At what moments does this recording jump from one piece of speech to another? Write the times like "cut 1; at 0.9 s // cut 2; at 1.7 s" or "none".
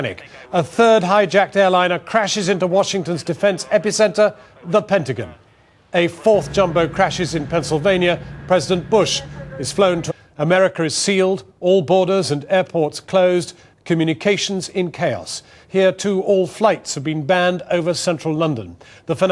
none